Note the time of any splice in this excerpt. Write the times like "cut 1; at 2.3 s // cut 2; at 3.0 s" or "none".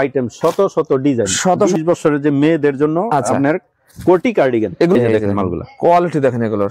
cut 1; at 1.8 s // cut 2; at 5.0 s